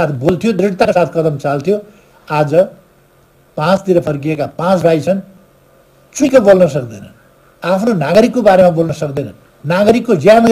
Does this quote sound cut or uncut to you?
uncut